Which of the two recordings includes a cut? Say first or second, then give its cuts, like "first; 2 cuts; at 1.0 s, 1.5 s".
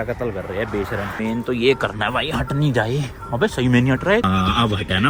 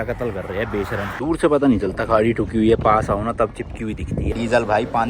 second; 2 cuts; at 1.2 s, 4.3 s